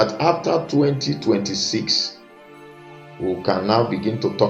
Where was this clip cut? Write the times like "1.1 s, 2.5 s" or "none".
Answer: none